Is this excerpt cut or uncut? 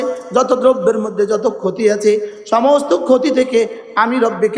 uncut